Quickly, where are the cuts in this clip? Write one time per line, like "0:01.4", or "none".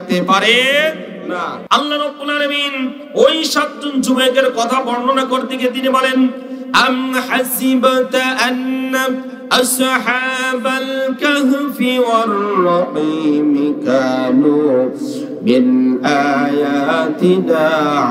0:01.6